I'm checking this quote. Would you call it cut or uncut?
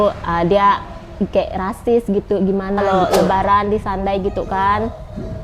cut